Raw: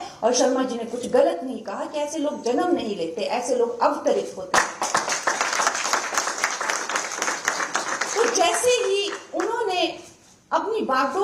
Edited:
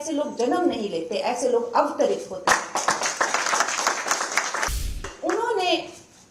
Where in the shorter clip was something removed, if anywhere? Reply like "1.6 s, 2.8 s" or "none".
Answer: 5.1 s